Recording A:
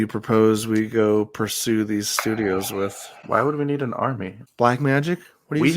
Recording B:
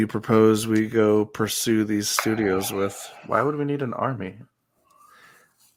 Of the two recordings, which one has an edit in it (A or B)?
A